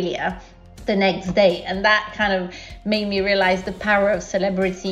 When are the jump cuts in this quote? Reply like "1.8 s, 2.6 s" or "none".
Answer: none